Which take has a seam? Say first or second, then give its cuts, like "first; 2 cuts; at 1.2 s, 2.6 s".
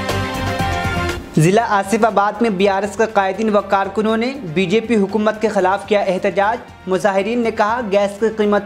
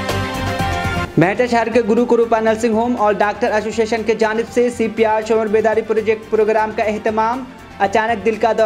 first; 1 cut; at 1.0 s